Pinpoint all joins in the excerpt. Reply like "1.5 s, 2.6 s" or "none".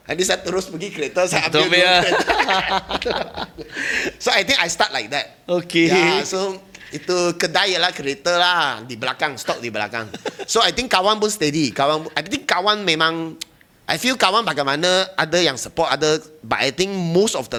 none